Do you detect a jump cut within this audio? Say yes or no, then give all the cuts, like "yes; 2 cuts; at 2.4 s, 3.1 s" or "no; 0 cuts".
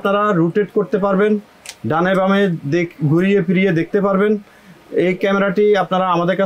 no; 0 cuts